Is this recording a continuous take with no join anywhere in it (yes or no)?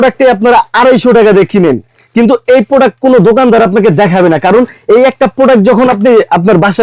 yes